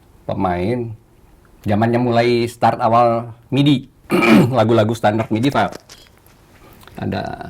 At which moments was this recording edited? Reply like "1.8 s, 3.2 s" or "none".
none